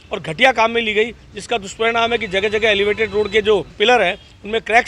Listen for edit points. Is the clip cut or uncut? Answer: cut